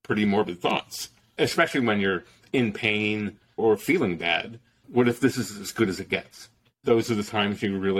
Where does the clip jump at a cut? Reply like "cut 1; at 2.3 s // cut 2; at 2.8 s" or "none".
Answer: cut 1; at 1.3 s // cut 2; at 3.6 s // cut 3; at 4.8 s // cut 4; at 6.7 s